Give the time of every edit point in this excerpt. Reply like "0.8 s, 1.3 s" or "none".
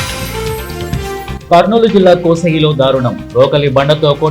1.0 s